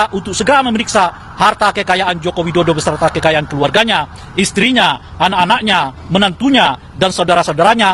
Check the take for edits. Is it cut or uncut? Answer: uncut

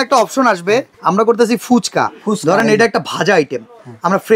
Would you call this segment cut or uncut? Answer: cut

